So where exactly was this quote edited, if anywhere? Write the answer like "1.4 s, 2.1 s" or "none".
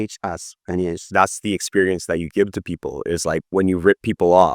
1.0 s